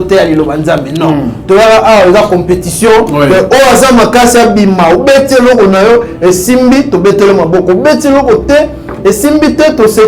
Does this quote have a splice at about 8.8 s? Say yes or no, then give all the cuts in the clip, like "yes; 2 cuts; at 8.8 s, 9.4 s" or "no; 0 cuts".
no; 0 cuts